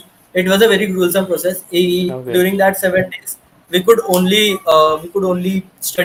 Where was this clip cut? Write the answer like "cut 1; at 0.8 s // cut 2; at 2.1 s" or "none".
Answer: none